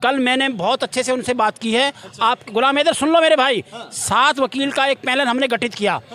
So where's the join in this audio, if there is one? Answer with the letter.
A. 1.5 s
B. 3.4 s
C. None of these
C